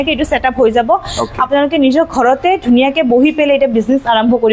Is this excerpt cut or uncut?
uncut